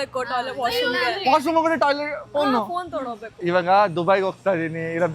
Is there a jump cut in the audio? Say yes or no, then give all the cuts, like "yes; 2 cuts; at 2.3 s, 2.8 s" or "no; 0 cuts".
yes; 1 cut; at 3.4 s